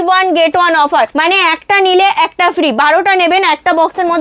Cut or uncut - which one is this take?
cut